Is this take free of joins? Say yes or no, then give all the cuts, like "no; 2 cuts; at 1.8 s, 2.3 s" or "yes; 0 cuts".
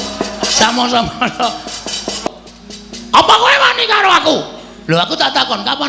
no; 1 cut; at 2.3 s